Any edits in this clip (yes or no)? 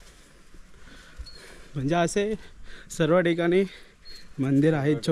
no